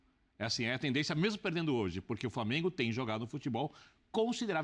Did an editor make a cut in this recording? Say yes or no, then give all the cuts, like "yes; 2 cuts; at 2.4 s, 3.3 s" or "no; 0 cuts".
yes; 1 cut; at 3.4 s